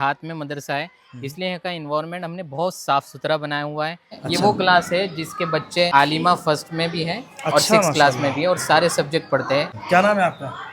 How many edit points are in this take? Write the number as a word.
three